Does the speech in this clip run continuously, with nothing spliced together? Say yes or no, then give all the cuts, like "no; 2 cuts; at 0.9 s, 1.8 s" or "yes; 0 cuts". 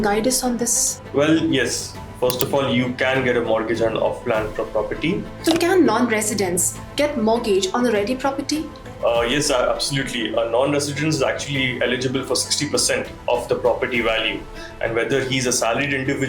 no; 1 cut; at 5.5 s